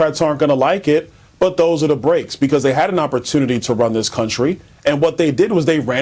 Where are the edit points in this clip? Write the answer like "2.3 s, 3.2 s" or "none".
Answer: none